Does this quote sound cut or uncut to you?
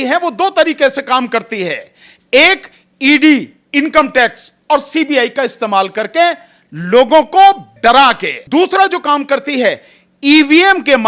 cut